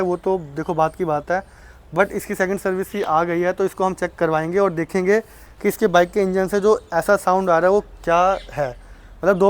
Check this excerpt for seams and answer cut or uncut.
uncut